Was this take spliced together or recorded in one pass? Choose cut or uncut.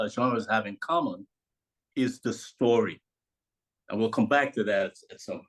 uncut